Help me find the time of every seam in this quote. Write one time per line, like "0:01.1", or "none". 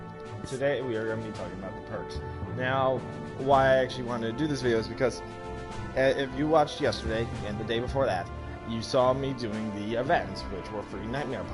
none